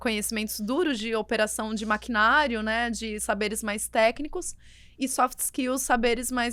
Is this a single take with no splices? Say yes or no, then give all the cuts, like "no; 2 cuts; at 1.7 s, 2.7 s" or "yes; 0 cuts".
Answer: yes; 0 cuts